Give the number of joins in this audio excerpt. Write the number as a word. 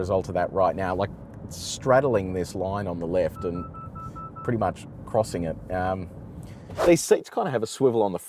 one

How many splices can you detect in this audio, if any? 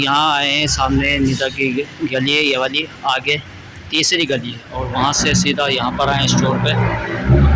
zero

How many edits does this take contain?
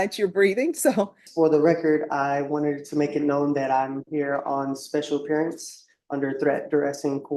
one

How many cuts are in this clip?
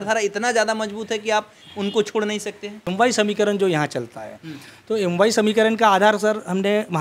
one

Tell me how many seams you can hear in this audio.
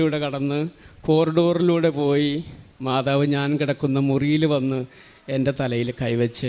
zero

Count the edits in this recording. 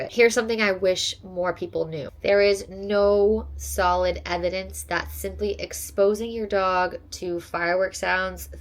one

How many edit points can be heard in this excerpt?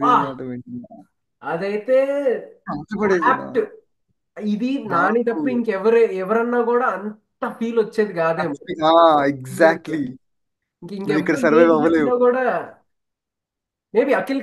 zero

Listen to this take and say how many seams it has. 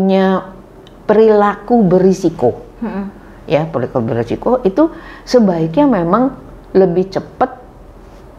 zero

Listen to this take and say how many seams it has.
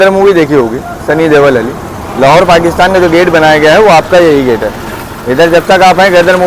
zero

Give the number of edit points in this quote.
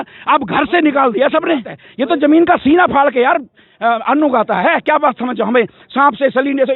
one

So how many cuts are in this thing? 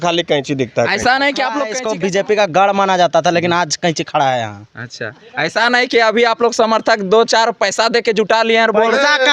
one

